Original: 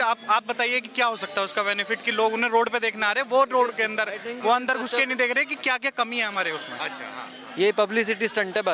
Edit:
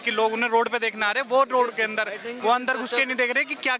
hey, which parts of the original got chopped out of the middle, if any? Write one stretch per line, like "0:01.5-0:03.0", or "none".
none